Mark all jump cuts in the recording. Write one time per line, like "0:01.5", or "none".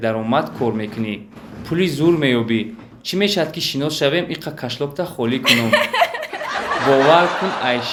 none